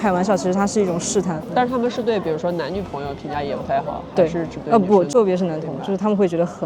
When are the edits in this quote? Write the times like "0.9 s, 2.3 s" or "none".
1.4 s, 5.1 s